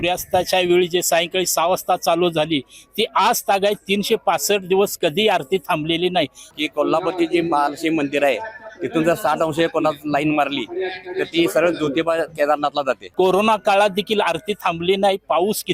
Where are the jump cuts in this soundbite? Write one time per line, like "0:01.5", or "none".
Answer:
0:06.4
0:13.0